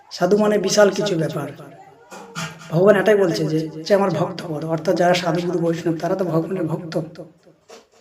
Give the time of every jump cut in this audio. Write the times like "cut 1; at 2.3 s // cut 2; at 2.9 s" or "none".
cut 1; at 3.8 s

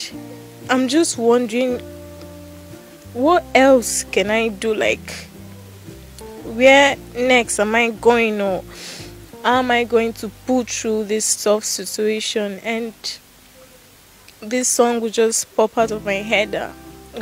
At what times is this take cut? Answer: cut 1; at 1.8 s // cut 2; at 3.1 s

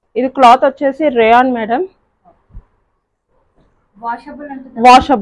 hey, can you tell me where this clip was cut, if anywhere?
none

